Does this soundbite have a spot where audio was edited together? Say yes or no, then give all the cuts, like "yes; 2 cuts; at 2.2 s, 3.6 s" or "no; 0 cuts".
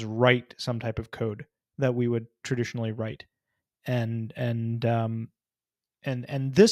no; 0 cuts